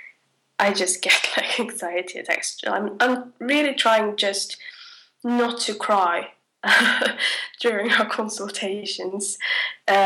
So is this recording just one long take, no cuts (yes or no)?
no